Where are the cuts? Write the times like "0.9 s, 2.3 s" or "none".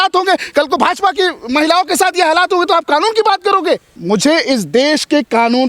4.0 s